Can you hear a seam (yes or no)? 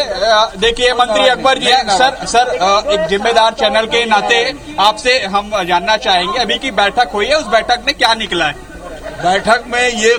no